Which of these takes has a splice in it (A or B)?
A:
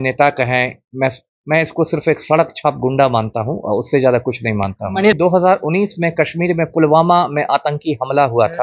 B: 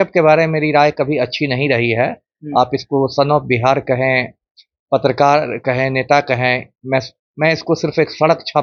A